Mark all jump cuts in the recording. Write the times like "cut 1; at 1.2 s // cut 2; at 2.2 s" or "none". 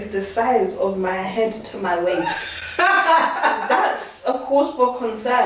none